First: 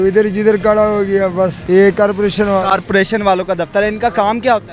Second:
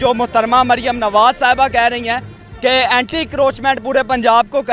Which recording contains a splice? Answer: first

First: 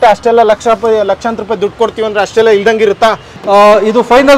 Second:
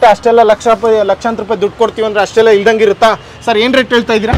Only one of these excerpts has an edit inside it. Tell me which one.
first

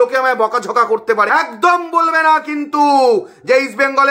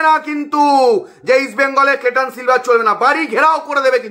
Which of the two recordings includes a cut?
first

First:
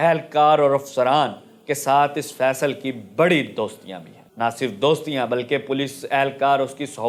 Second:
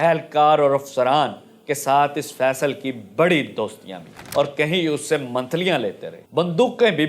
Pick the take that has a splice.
second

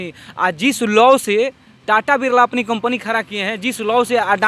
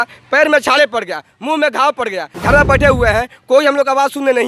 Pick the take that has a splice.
second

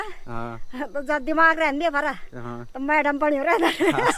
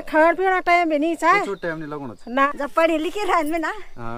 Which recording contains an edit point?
second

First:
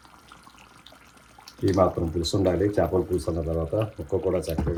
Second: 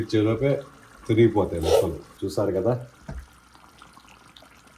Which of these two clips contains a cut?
second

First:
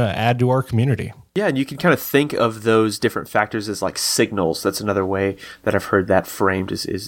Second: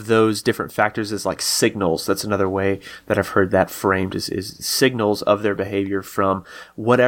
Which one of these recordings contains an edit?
first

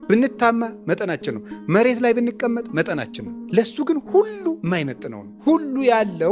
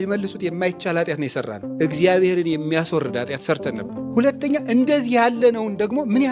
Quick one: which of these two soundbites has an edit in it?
second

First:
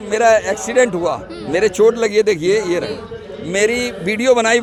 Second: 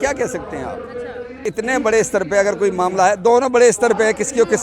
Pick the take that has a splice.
second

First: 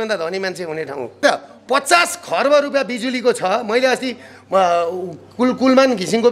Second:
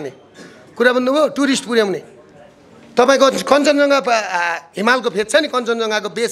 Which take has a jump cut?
first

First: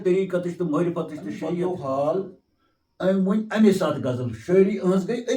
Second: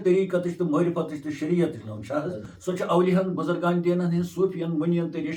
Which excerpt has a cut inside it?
first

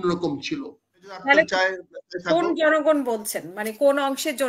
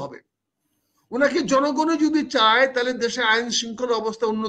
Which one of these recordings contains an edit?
first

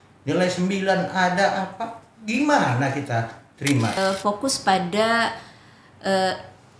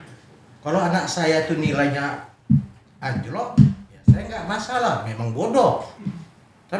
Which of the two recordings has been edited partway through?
first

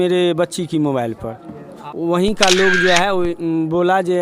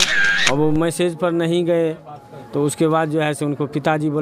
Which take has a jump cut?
first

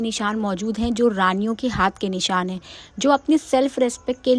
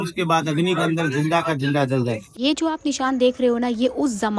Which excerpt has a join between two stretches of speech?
second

